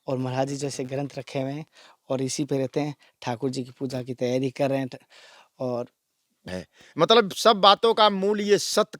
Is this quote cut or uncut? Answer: cut